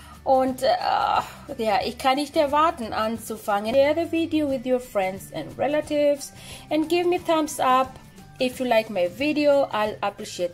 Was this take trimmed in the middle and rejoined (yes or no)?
yes